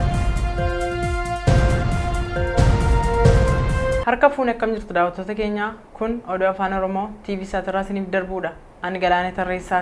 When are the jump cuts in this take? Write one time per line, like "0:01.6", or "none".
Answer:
0:01.3